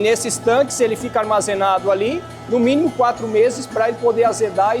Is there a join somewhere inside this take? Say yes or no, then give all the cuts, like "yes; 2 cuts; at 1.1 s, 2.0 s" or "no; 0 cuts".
no; 0 cuts